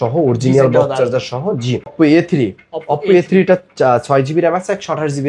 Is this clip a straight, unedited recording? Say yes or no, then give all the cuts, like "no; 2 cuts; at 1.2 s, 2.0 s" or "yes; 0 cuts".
no; 1 cut; at 1.9 s